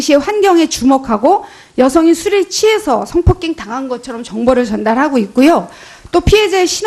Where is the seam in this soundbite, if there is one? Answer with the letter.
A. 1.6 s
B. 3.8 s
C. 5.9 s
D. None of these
C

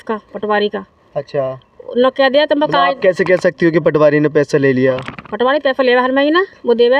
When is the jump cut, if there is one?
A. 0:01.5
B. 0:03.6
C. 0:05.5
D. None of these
D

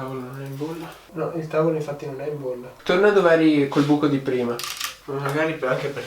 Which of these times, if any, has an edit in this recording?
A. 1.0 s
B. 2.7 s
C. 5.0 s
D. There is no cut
C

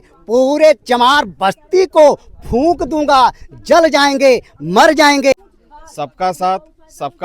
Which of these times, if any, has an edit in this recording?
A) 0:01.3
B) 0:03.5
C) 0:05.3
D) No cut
C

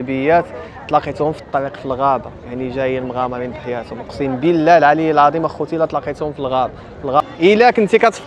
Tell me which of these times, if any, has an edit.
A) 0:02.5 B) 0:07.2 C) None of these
B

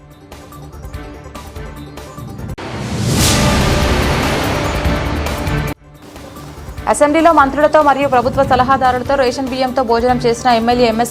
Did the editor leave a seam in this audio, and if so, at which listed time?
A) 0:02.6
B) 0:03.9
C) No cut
C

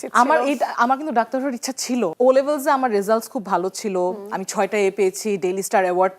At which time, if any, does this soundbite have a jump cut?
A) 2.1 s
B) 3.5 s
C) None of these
A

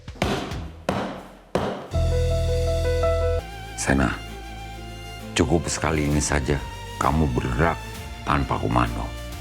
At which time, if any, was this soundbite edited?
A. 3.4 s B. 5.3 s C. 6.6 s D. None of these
A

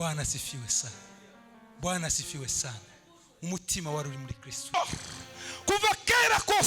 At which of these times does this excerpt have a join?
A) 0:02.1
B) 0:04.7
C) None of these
B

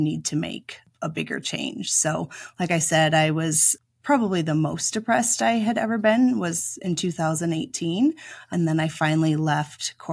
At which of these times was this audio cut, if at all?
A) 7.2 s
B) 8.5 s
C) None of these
B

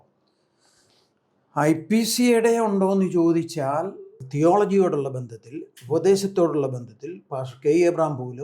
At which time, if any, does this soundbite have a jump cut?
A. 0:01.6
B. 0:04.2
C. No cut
B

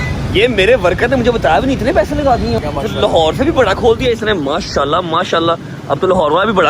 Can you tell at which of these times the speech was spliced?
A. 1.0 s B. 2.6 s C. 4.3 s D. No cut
B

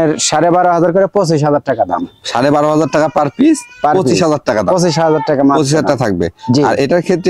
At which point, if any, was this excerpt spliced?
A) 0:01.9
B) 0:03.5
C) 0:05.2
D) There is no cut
D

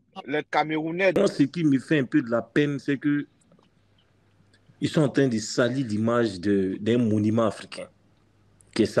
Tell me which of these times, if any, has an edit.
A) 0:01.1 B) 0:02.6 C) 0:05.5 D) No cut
A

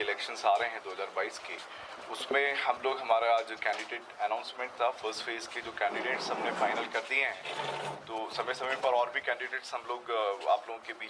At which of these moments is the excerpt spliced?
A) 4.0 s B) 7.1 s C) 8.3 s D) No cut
D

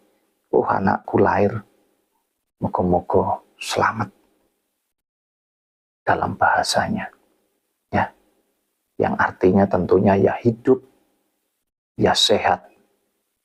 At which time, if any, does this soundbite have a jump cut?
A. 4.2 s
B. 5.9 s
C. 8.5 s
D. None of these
D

